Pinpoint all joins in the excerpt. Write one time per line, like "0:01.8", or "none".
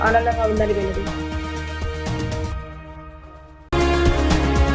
none